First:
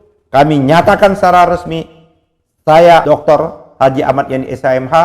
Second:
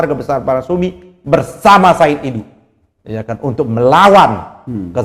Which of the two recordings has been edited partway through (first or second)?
first